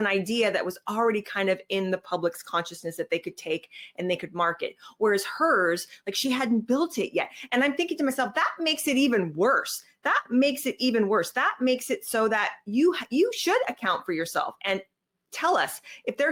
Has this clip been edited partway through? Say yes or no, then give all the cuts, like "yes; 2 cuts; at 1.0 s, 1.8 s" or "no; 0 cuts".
no; 0 cuts